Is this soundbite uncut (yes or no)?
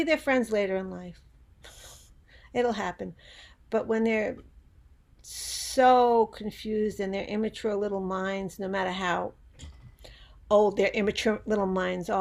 yes